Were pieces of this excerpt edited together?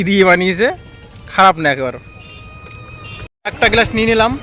no; 0 cuts

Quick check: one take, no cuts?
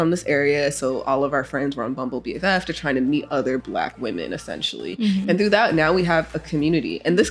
yes; 0 cuts

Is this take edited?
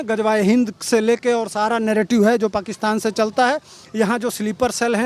no; 0 cuts

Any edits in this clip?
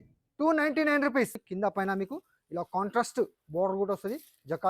yes; 1 cut; at 1.4 s

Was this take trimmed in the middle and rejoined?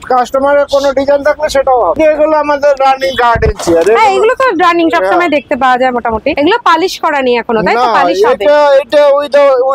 no; 0 cuts

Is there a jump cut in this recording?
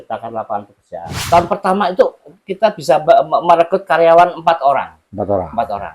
yes; 1 cut; at 1.2 s

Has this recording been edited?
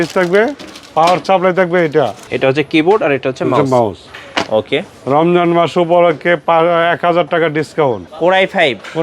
yes; 2 cuts; at 2.2 s, 8.1 s

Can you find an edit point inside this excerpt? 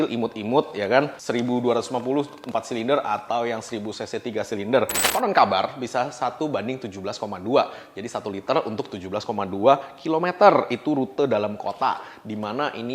yes; 1 cut; at 5.1 s

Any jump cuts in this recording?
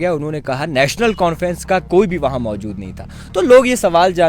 no; 0 cuts

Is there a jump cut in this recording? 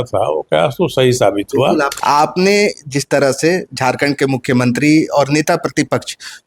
yes; 1 cut; at 1.9 s

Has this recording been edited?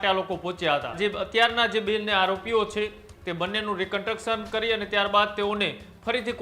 yes; 1 cut; at 1.0 s

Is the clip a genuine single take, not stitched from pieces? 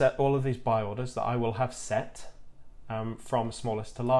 yes; 0 cuts

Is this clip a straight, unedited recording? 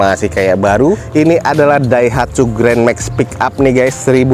yes; 0 cuts

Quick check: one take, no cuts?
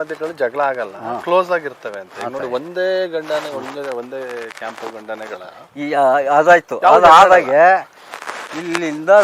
yes; 0 cuts

